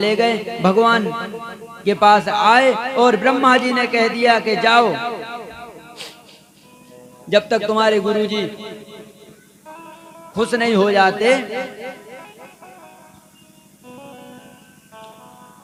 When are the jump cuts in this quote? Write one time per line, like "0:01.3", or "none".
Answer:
none

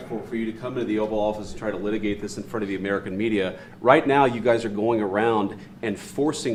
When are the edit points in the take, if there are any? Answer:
none

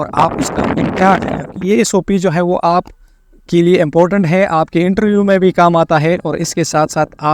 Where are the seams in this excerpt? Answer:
0:01.6

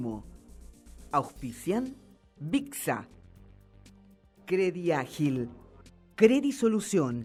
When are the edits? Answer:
none

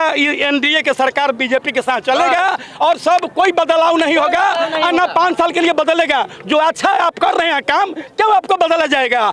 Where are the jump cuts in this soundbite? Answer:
none

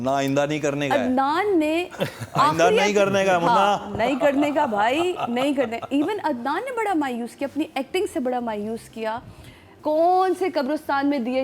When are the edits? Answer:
0:09.7

